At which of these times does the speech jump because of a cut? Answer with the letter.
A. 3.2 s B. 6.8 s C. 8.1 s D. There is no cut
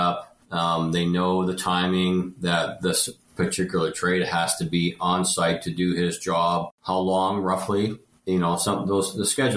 B